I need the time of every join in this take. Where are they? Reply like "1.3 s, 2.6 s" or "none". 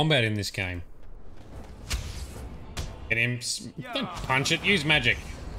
1.4 s